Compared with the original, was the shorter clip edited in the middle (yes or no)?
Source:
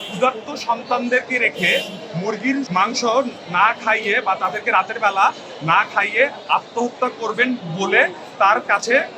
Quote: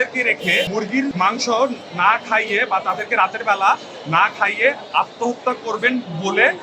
yes